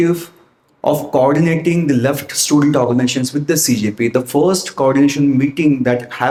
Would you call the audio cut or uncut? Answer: uncut